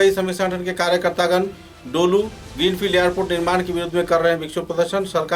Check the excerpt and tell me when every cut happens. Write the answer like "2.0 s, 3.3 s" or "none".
none